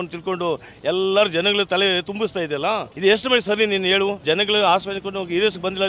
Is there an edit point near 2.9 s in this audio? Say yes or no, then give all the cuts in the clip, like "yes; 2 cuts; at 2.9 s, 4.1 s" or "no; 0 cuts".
yes; 2 cuts; at 2.9 s, 4.2 s